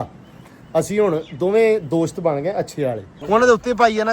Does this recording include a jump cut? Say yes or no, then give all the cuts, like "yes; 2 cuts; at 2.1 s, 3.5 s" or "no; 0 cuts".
yes; 1 cut; at 3.1 s